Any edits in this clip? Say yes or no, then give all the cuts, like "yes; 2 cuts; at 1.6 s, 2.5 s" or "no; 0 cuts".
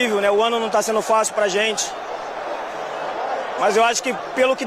no; 0 cuts